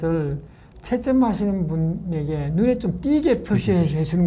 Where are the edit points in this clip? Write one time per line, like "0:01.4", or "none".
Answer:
none